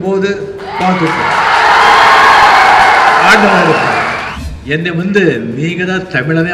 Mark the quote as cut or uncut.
cut